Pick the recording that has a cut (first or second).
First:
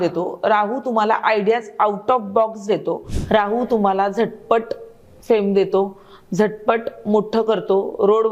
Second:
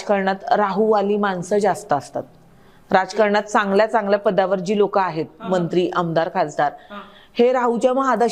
first